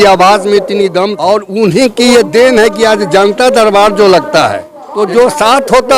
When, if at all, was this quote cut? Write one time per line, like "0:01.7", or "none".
0:01.3
0:04.8

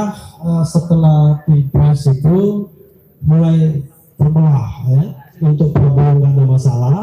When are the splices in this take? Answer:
0:05.4

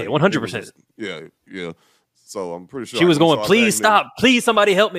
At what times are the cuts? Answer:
none

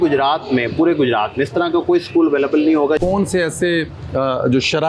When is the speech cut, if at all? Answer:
0:03.0

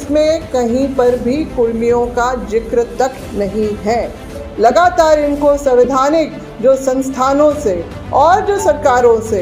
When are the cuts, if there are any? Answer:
0:04.4

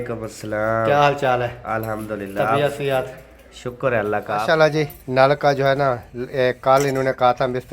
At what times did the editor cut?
0:04.4

